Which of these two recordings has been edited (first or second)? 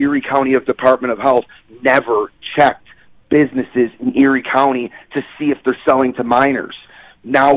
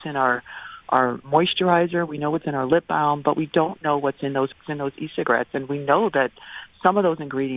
second